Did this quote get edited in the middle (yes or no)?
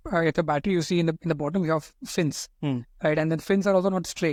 no